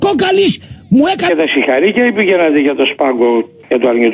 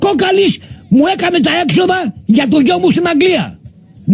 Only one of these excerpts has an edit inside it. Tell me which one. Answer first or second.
second